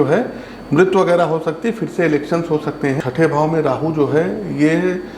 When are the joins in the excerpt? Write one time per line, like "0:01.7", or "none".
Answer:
0:03.0